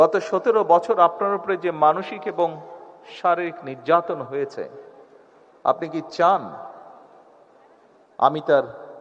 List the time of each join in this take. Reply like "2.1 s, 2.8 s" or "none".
none